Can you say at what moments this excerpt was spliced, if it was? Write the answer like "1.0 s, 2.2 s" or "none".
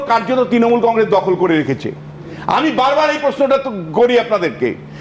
none